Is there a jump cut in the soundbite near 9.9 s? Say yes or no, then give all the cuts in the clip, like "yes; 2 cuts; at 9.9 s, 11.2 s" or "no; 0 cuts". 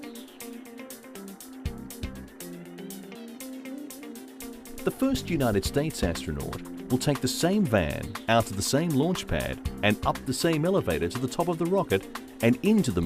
no; 1 cut; at 3.3 s